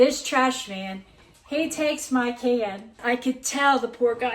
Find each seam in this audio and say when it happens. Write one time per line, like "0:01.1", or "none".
0:03.0